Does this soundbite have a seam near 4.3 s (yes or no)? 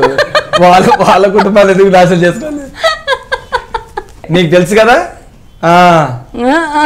yes